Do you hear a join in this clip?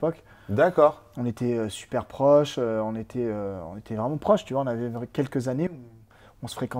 no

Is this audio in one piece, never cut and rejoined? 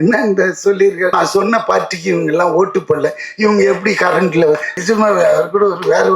no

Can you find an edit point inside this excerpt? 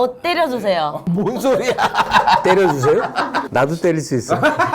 yes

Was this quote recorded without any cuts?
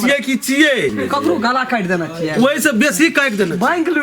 no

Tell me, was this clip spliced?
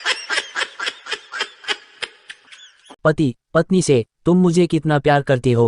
yes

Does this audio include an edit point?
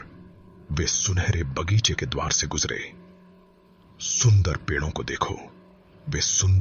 no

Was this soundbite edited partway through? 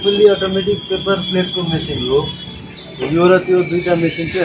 no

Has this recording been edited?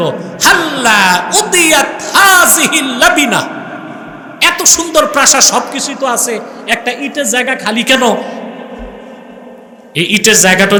no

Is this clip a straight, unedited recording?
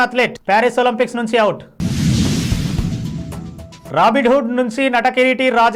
yes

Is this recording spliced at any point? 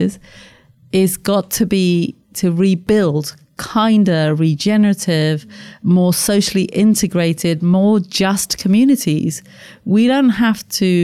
yes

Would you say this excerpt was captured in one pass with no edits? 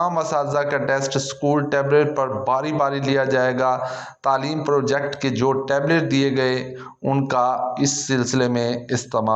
yes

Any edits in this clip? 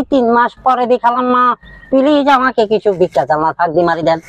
no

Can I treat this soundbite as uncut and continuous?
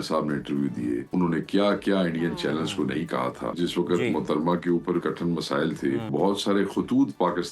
no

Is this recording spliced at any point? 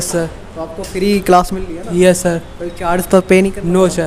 no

